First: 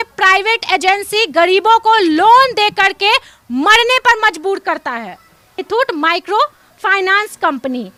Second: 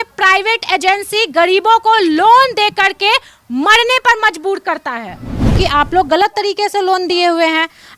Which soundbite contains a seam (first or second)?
second